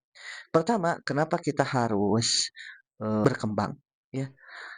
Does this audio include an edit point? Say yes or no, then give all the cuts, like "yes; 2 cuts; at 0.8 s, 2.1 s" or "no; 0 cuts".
yes; 1 cut; at 3.2 s